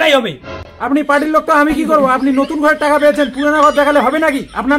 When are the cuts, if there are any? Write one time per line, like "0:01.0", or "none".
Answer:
none